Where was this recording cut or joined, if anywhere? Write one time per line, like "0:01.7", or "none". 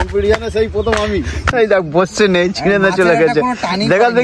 0:01.5